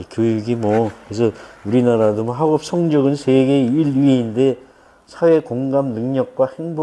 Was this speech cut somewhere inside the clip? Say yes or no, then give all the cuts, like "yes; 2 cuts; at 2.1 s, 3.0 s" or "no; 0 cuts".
no; 0 cuts